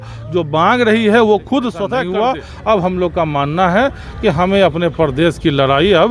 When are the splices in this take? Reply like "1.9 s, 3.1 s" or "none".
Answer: 1.9 s